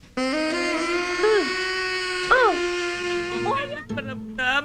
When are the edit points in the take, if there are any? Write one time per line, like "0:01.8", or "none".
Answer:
0:03.6